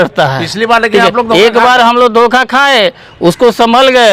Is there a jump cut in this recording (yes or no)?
no